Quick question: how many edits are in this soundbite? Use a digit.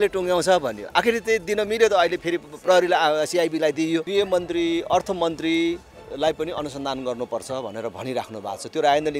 1